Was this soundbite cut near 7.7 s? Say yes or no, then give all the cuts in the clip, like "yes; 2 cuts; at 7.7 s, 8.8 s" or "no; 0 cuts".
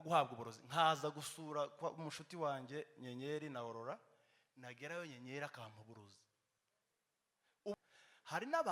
yes; 1 cut; at 7.7 s